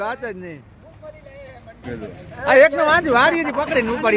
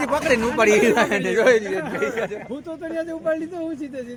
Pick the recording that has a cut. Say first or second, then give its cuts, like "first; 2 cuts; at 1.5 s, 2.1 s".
first; 1 cut; at 1.9 s